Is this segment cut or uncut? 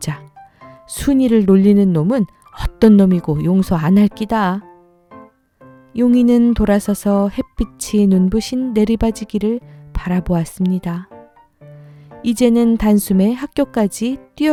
uncut